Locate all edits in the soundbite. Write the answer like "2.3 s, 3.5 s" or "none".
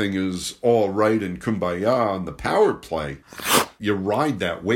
3.8 s